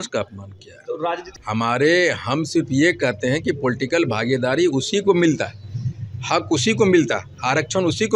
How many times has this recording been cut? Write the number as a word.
one